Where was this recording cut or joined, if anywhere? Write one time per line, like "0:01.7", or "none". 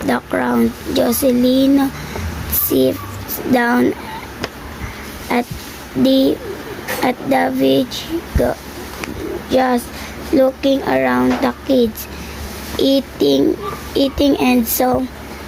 none